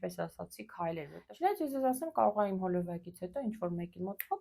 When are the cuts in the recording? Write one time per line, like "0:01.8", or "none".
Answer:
0:01.2